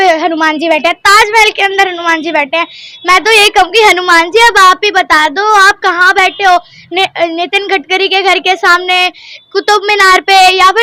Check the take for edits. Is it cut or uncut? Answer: uncut